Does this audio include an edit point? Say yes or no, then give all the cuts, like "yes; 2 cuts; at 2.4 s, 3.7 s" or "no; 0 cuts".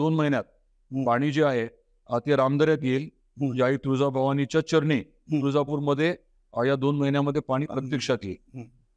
no; 0 cuts